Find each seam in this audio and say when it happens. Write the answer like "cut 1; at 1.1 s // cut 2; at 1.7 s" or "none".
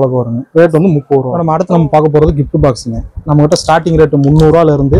cut 1; at 1.3 s

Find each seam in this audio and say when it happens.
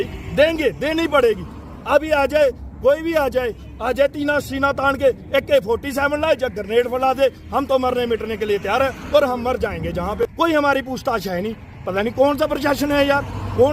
cut 1; at 10.3 s

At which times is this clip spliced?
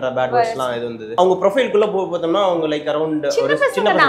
cut 1; at 1.2 s

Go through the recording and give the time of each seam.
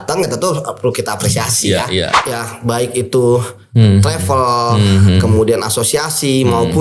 cut 1; at 2.1 s

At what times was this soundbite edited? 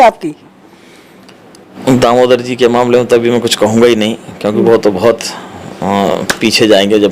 cut 1; at 1.8 s

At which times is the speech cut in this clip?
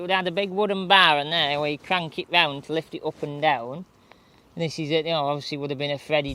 none

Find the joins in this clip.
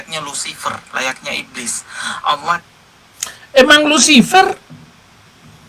none

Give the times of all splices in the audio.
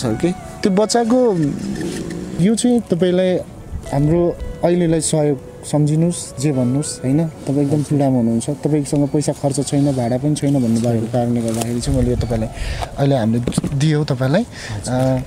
cut 1; at 2.4 s

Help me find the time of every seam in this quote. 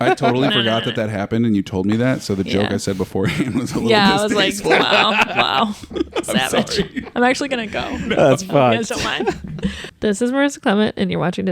cut 1; at 9.8 s

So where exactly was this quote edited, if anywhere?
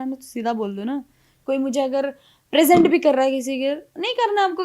none

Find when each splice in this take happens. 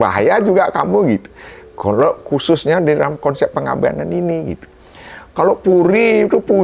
none

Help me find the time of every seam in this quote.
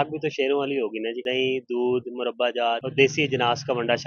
cut 1; at 1.2 s // cut 2; at 2.9 s

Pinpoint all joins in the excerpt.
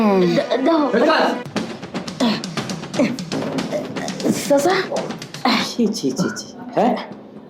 none

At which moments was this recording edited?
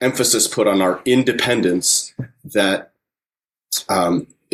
none

